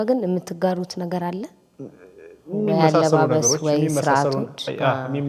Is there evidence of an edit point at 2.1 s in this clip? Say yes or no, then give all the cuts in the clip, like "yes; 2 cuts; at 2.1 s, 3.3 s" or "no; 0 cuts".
no; 0 cuts